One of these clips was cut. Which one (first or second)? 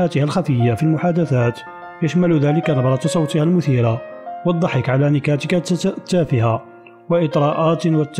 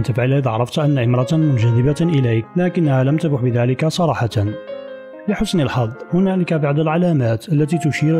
second